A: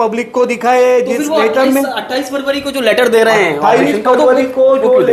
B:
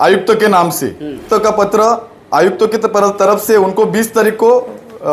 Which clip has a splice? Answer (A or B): B